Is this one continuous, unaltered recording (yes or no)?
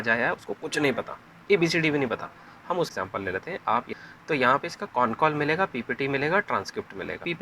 no